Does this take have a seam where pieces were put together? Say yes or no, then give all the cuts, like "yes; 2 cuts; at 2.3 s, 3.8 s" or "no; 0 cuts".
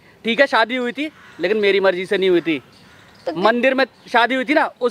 no; 0 cuts